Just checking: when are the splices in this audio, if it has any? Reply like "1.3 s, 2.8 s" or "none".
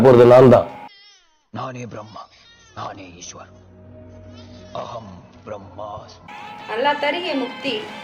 none

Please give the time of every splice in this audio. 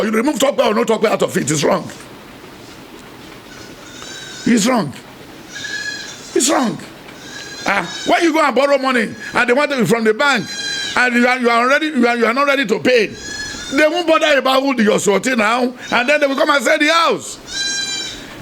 none

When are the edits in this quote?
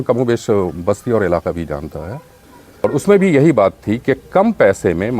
2.8 s

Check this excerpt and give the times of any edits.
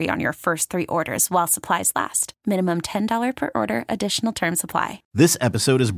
5.1 s

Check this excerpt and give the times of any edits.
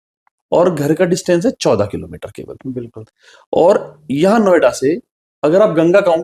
none

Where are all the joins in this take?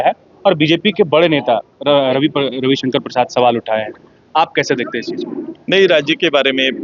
none

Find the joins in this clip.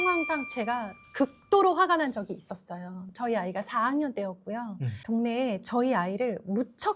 none

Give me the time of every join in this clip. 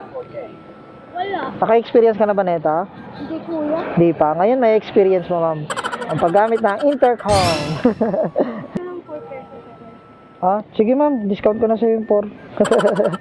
8.8 s

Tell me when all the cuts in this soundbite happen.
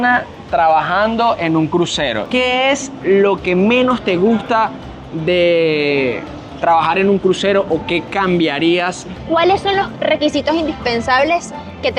2.2 s, 9.2 s

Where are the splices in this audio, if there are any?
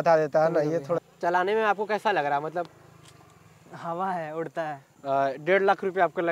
1.1 s, 4.9 s

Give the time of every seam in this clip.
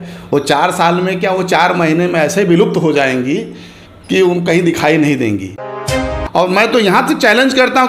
6.0 s

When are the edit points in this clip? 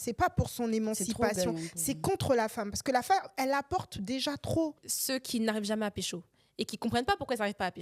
4.9 s

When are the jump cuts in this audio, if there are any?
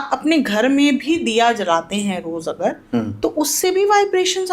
none

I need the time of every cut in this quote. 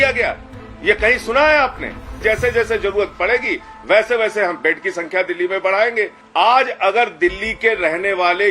2.2 s, 6.2 s

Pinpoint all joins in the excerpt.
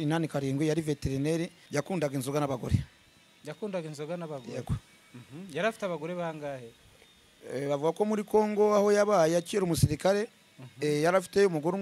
1.6 s

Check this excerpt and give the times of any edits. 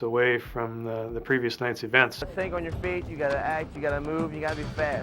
2.3 s

